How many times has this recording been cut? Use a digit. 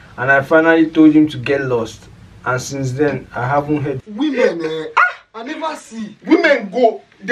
1